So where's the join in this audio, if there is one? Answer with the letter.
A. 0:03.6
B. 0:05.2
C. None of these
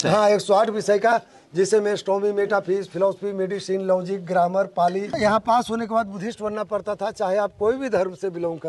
B